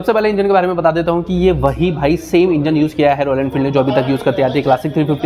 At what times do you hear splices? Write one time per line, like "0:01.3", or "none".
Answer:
none